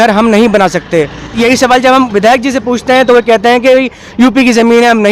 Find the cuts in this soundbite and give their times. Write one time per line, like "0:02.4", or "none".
0:01.3